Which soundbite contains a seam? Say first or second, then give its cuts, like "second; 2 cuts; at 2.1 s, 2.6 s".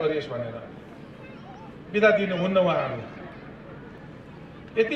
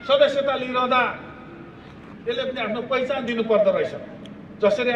first; 1 cut; at 4.0 s